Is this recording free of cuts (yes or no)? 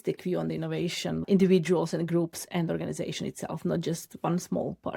no